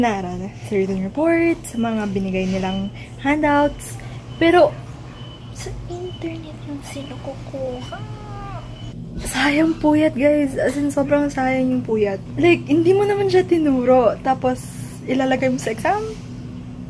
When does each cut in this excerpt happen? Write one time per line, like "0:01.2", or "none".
0:08.7
0:12.2